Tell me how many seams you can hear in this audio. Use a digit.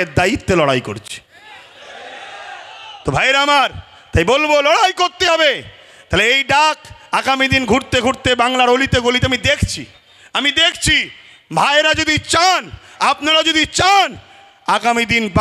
0